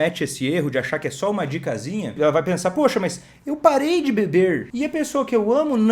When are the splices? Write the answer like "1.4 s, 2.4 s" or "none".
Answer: 2.1 s, 4.7 s